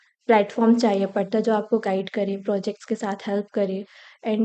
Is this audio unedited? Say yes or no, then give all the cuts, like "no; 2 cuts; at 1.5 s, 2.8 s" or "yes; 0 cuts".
yes; 0 cuts